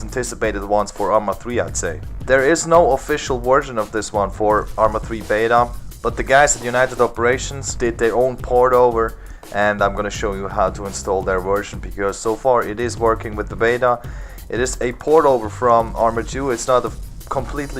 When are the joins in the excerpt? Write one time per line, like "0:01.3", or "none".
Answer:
0:06.9